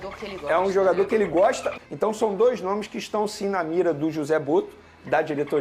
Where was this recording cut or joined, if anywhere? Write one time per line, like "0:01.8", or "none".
0:01.7